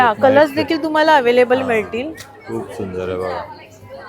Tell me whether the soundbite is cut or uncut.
uncut